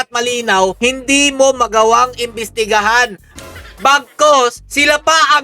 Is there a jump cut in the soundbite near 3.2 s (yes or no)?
no